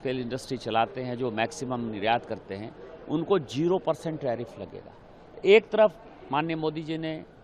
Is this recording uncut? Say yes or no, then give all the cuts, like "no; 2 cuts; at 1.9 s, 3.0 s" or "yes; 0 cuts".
yes; 0 cuts